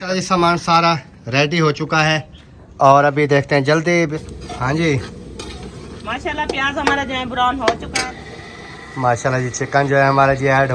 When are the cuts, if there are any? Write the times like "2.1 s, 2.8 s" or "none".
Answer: 4.2 s, 8.1 s